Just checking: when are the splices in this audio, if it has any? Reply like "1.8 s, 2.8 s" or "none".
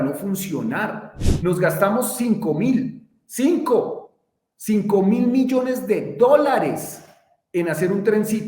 1.2 s